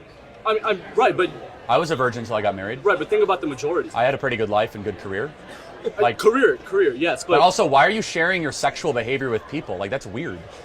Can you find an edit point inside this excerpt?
yes; 1 cut; at 7.0 s

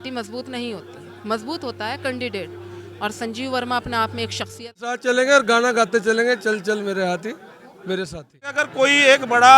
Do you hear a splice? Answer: yes; 2 cuts; at 5.0 s, 8.6 s

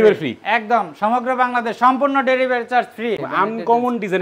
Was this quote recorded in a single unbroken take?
no; 1 cut; at 3.2 s

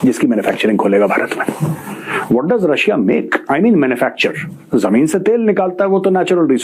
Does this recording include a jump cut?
no; 0 cuts

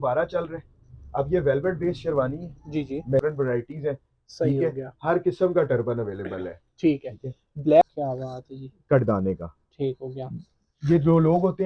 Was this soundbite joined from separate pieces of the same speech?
yes; 2 cuts; at 3.2 s, 7.8 s

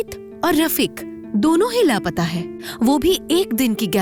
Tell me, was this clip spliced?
no; 0 cuts

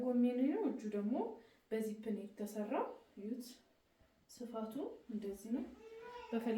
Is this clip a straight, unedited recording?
yes; 0 cuts

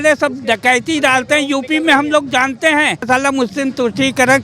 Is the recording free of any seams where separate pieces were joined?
no; 1 cut; at 3.0 s

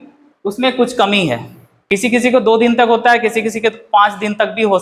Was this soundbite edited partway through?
yes; 1 cut; at 1.9 s

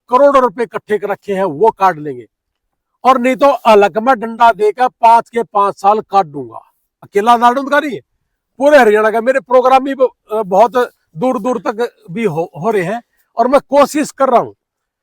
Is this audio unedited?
yes; 0 cuts

